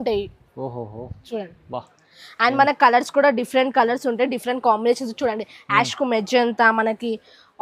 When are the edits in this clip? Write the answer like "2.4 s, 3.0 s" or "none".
none